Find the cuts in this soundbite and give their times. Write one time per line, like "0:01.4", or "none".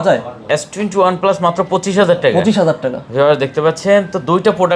none